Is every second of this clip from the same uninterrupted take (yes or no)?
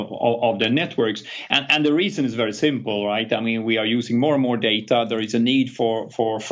yes